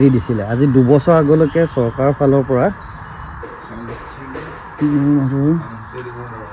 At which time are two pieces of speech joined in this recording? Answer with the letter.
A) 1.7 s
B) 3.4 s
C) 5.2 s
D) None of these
B